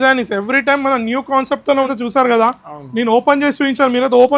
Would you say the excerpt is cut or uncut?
cut